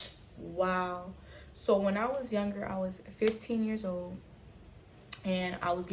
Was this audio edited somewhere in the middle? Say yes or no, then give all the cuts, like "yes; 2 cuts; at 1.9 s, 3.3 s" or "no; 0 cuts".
no; 0 cuts